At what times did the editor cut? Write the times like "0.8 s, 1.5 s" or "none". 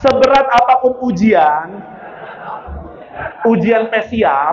none